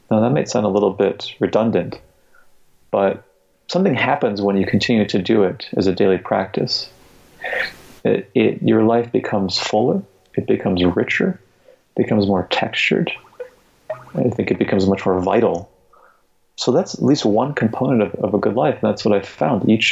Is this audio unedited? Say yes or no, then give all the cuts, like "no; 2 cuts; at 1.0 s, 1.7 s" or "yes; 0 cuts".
yes; 0 cuts